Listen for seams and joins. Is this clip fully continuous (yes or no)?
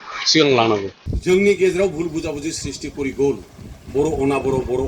no